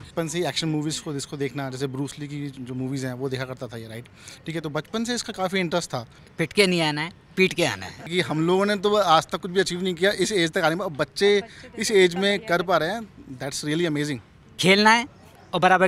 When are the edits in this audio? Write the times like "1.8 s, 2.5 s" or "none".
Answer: 6.2 s, 8.1 s, 14.6 s